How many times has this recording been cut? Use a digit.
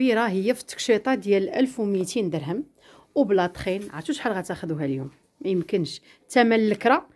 0